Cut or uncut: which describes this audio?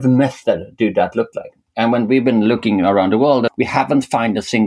cut